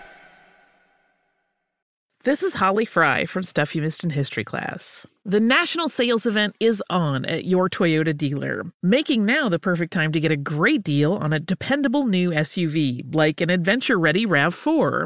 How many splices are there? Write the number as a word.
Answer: one